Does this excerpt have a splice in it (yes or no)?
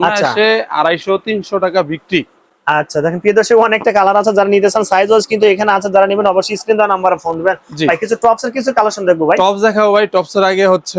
no